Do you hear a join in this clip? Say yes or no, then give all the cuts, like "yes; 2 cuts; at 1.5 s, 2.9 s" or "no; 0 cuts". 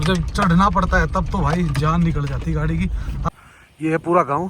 yes; 1 cut; at 3.3 s